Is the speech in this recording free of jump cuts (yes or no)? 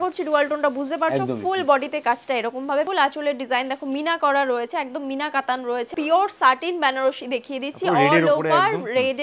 no